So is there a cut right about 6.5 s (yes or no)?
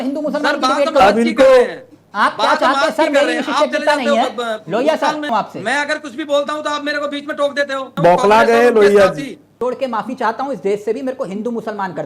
no